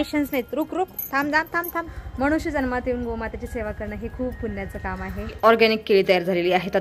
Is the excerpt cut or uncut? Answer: cut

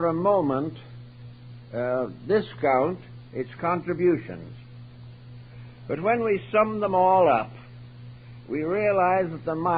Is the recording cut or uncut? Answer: uncut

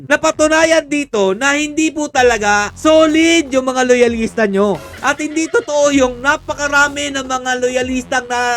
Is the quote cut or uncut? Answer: uncut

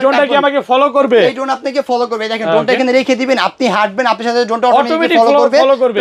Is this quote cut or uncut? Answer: uncut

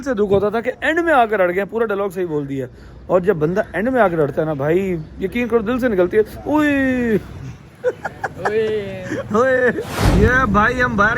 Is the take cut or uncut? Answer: cut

